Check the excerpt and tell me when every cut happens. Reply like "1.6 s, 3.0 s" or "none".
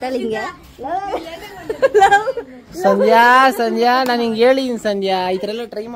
none